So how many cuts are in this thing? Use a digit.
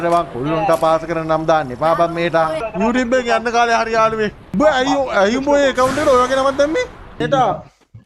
3